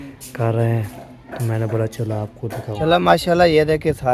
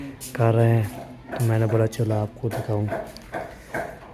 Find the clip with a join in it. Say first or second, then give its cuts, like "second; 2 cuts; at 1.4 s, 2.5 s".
first; 1 cut; at 2.7 s